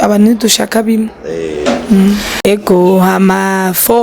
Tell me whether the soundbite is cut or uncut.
cut